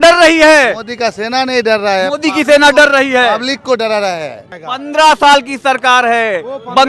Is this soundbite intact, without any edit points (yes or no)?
no